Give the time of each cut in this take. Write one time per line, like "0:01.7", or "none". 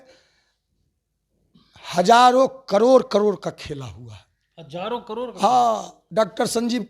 0:06.0